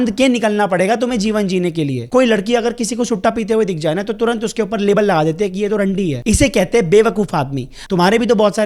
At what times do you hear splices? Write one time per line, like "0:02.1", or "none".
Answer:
0:02.0
0:07.7